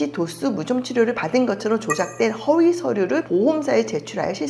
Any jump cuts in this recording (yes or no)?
no